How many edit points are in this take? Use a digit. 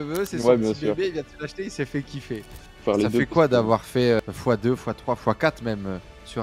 2